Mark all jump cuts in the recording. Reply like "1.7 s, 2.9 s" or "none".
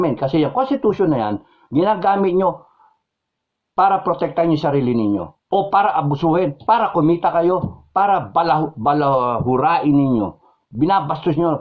none